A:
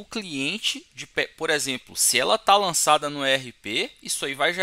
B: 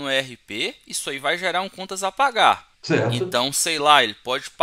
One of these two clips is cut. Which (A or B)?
B